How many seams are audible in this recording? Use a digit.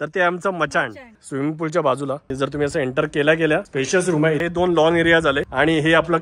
2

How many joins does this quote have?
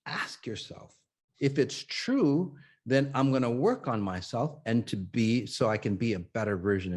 1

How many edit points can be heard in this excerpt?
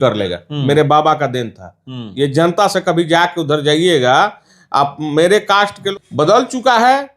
1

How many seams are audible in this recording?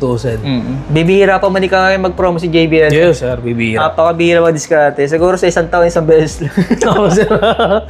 0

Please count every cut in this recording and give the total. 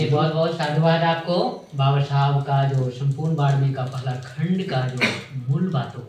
0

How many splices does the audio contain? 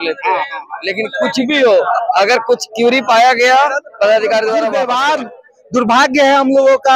1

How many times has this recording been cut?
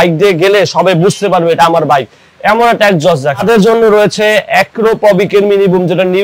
1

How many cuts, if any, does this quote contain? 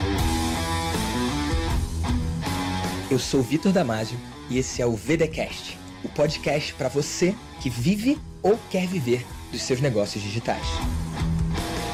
0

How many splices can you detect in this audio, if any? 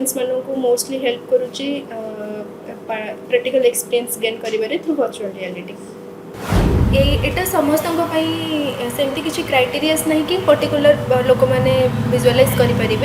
1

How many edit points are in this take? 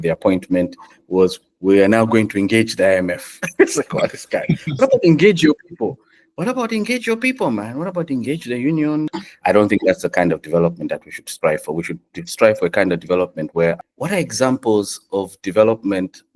2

